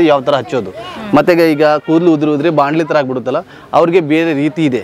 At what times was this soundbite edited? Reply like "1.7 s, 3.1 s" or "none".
none